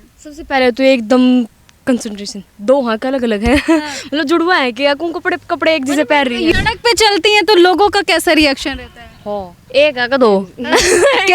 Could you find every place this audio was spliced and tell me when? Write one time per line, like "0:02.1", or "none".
0:06.5